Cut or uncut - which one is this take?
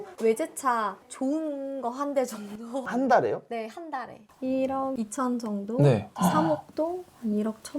cut